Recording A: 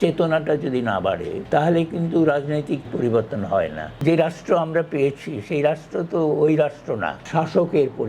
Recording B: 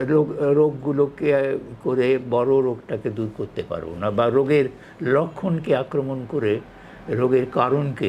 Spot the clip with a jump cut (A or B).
A